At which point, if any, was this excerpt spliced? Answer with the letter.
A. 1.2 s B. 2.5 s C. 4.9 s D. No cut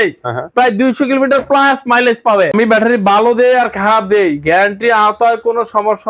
B